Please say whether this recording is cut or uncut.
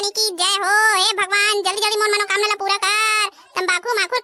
uncut